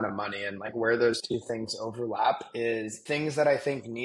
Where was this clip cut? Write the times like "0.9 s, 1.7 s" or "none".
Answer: 3.0 s